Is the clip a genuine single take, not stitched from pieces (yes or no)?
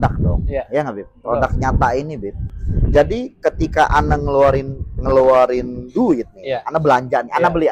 yes